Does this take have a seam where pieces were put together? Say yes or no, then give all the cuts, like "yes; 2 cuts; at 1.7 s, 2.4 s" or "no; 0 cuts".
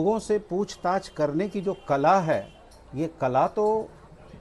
no; 0 cuts